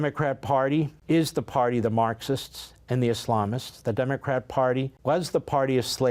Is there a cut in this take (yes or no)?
yes